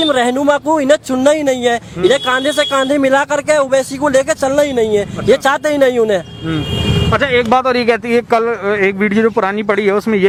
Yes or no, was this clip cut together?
no